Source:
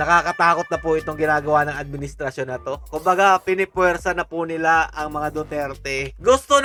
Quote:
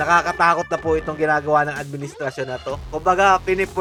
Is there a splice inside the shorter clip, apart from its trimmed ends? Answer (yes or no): no